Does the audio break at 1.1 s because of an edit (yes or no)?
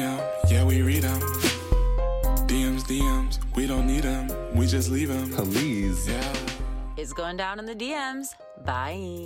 no